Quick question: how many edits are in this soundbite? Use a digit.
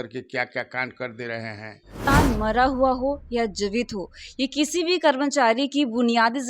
1